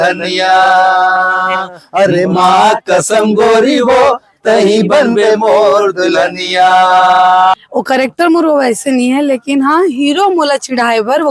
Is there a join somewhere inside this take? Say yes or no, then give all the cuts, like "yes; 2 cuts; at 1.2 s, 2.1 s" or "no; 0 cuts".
yes; 1 cut; at 7.6 s